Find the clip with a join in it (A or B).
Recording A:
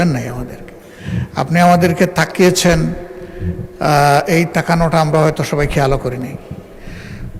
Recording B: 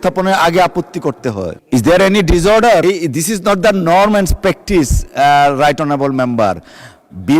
B